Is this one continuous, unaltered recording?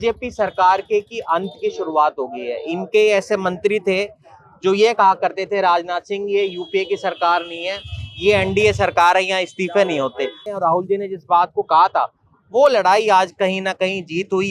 no; 1 cut; at 10.5 s

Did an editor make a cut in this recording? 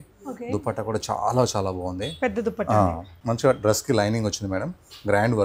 yes; 1 cut; at 3.1 s

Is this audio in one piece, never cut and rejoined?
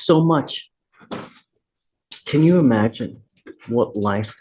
no; 1 cut; at 2.1 s

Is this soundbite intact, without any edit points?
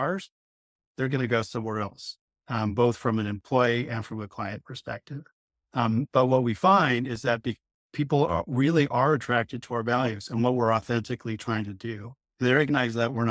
yes; 0 cuts

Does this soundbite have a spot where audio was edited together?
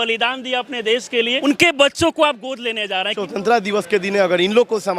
yes; 2 cuts; at 1.4 s, 3.2 s

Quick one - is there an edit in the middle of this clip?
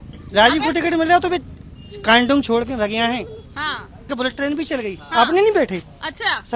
yes; 1 cut; at 4.1 s

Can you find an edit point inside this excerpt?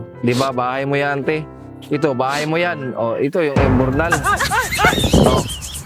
no; 0 cuts

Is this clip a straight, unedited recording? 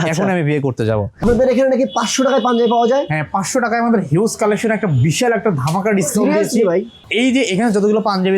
no; 2 cuts; at 1.2 s, 7.0 s

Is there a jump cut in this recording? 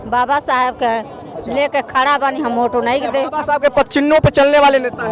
no; 0 cuts

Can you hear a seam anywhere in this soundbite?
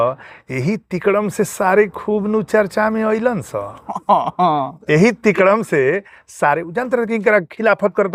no; 0 cuts

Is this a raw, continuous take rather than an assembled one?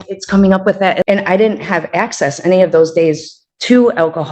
no; 1 cut; at 1.0 s

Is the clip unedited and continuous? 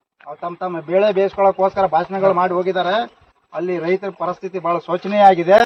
yes; 0 cuts

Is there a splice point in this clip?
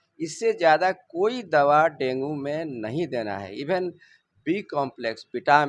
no; 0 cuts

